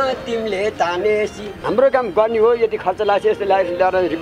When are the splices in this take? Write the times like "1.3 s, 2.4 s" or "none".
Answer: 1.5 s